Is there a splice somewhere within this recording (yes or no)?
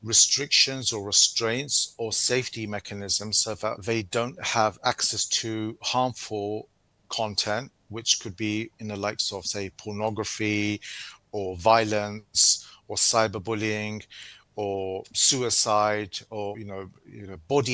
yes